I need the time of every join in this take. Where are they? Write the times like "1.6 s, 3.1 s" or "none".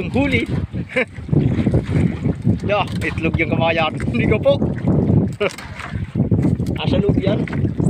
6.1 s